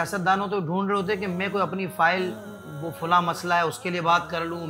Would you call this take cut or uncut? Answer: uncut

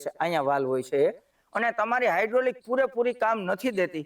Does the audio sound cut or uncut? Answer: cut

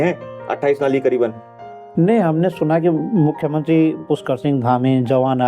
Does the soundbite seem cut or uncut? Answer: cut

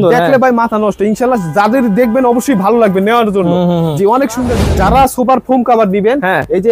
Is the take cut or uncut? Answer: cut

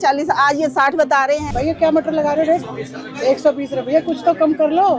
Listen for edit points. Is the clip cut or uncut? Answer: cut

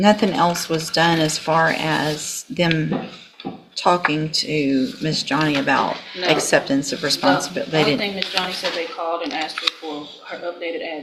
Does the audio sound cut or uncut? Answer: uncut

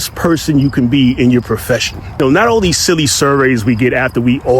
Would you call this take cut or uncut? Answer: cut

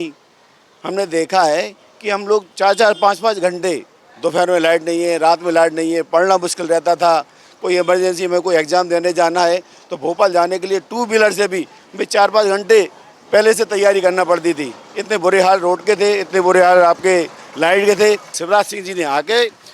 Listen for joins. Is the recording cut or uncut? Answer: cut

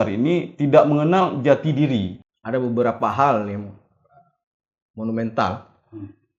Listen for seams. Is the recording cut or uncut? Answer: cut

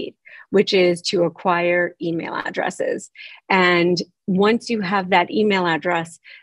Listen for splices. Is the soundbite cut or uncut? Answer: uncut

